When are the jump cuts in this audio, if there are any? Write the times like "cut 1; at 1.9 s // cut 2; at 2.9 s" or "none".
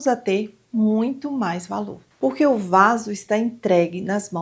cut 1; at 2.0 s